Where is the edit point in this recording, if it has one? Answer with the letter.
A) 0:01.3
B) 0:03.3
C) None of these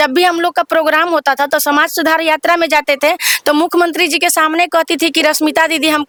C